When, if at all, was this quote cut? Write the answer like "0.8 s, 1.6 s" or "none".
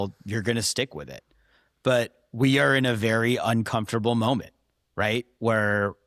none